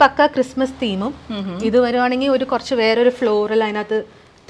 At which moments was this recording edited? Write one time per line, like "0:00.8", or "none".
none